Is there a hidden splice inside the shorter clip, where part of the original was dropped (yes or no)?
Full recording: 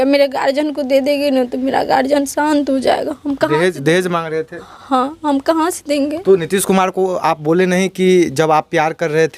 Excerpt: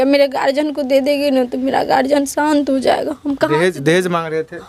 no